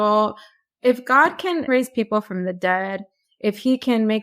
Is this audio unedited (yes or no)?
no